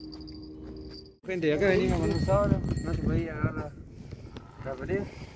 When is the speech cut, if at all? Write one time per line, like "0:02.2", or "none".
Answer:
0:01.3

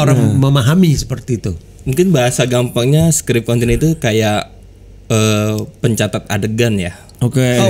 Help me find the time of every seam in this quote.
none

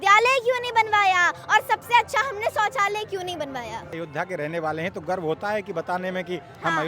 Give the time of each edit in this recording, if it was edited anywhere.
0:03.9

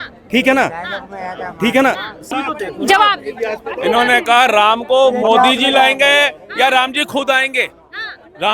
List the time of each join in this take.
0:02.3

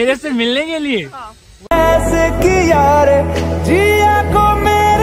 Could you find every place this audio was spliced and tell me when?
none

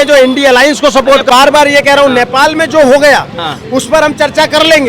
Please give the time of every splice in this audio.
0:01.3

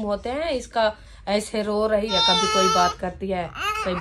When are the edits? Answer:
0:02.1

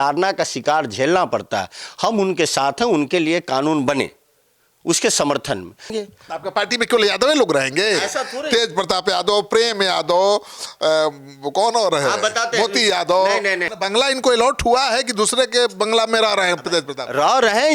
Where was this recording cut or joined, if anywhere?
0:05.9
0:13.7

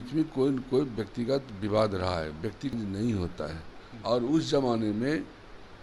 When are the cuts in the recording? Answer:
0:02.7

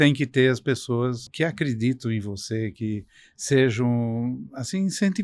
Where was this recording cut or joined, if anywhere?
0:01.3

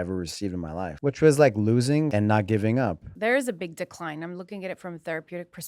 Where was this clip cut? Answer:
0:00.9
0:02.1
0:03.1

